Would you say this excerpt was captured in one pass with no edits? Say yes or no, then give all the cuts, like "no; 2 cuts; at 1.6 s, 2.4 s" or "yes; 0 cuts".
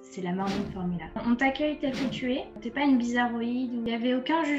no; 3 cuts; at 1.2 s, 2.6 s, 3.9 s